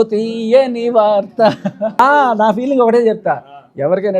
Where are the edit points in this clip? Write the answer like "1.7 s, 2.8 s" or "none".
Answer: 2.0 s